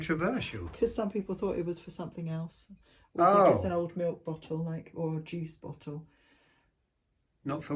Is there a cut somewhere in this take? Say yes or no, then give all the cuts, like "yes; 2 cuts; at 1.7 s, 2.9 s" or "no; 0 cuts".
no; 0 cuts